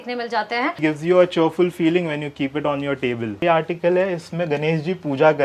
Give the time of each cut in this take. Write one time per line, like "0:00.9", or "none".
0:00.8
0:03.4